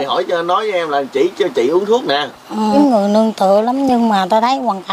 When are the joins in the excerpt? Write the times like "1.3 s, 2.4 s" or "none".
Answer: 2.7 s